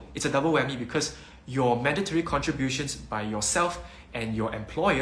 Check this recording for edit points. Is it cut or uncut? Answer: uncut